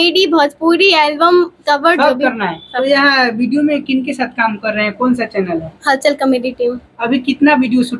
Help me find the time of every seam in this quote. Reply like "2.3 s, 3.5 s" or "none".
2.7 s